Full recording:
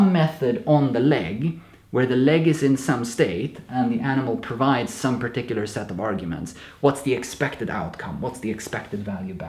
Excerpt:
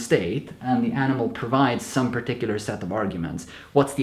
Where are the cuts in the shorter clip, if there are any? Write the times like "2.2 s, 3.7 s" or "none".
none

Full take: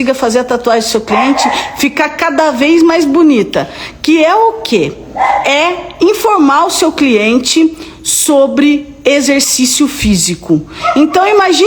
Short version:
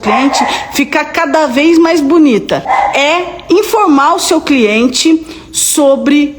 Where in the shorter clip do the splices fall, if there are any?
2.6 s

